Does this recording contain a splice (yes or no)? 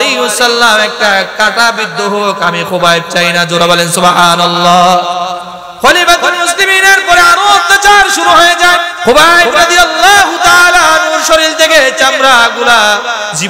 yes